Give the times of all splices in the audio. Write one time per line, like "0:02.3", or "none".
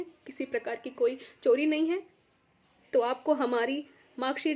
none